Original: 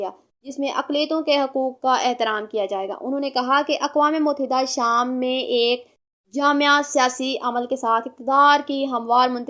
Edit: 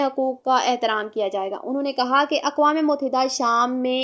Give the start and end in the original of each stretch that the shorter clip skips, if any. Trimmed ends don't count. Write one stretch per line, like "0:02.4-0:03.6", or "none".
none